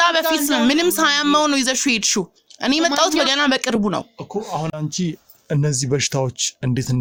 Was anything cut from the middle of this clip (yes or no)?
no